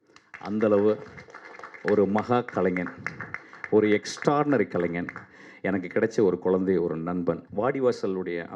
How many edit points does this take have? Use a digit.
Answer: 1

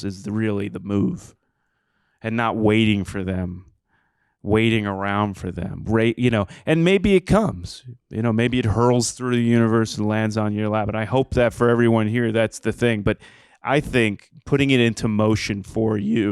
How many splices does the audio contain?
1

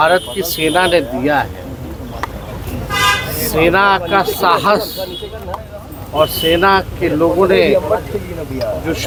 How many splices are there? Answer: 0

